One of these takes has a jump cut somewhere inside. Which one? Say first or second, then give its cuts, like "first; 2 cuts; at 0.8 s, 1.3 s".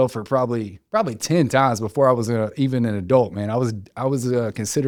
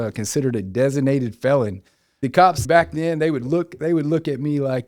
second; 1 cut; at 2.4 s